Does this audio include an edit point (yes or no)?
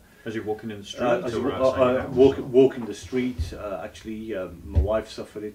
no